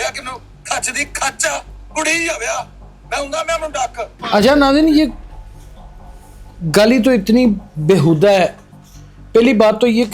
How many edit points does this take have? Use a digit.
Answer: 0